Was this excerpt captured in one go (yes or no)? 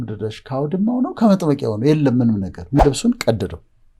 no